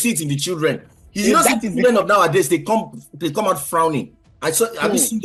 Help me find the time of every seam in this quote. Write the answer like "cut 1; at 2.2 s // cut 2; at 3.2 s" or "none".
none

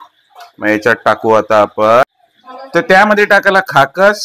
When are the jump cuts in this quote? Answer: cut 1; at 2.0 s

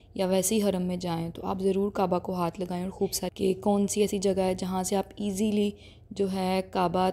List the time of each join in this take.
cut 1; at 3.2 s

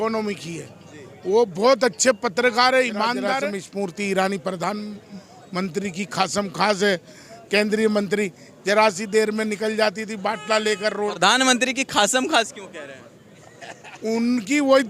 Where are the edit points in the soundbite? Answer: cut 1; at 3.5 s

